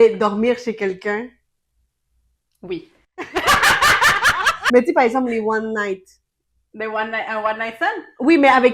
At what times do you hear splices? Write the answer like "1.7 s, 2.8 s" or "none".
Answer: 4.6 s